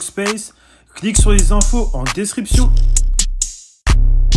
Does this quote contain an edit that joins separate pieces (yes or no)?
no